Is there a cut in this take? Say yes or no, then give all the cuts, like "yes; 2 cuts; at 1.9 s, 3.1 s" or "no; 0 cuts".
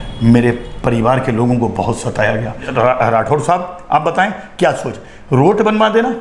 yes; 1 cut; at 2.6 s